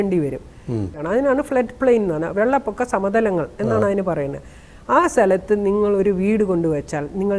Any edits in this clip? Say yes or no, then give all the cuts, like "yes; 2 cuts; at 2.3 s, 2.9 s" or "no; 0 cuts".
yes; 1 cut; at 0.9 s